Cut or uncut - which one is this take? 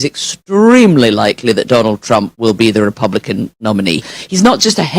cut